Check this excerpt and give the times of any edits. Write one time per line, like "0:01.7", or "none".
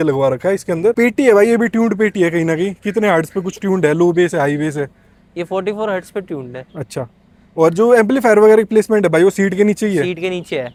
none